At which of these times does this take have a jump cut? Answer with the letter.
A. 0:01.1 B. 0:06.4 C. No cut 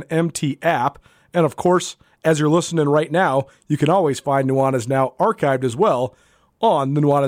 C